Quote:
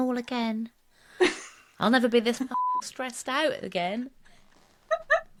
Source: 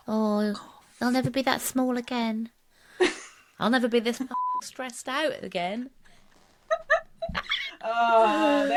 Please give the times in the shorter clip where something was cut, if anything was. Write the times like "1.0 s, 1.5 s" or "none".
none

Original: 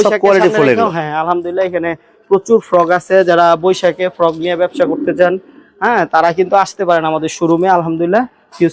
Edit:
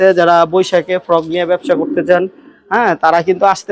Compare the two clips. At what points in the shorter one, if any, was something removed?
none

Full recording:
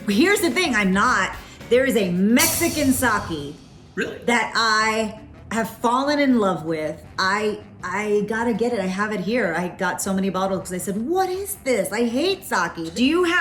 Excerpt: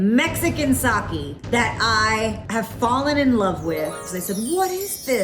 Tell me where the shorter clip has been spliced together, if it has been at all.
1.4 s, 2.4 s, 4.1 s

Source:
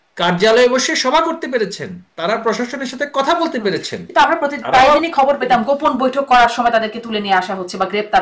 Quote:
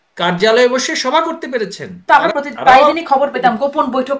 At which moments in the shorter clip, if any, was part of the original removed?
1.9 s

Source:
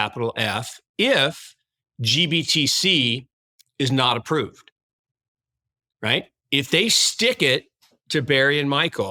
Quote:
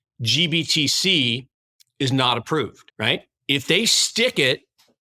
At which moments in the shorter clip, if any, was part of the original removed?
2.8 s

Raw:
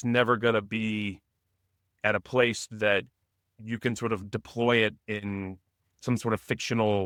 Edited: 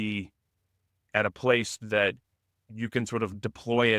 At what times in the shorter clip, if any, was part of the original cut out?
none

